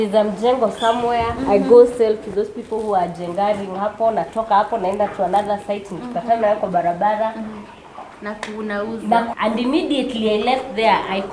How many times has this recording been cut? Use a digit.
1